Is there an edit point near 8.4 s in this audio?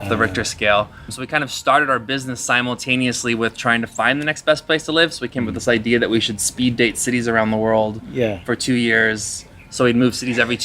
no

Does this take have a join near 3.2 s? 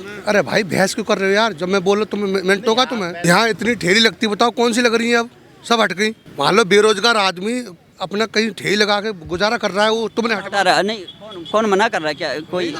yes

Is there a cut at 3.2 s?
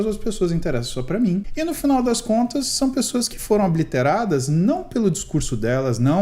no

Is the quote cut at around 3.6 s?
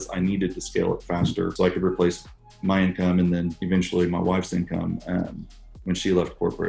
yes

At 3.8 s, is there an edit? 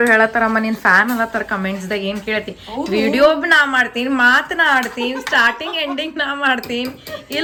no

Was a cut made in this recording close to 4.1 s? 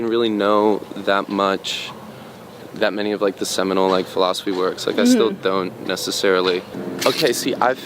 no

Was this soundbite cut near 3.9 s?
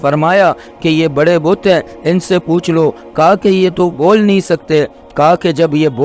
yes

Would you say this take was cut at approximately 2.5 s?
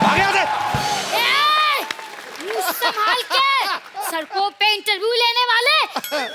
no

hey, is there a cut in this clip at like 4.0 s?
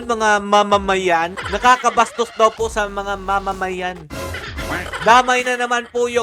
no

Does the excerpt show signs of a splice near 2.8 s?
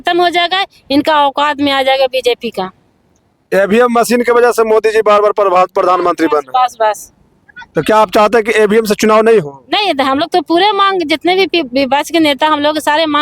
no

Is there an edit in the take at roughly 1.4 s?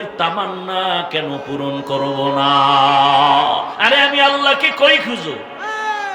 no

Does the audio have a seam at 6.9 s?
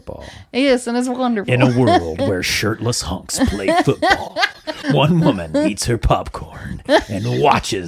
no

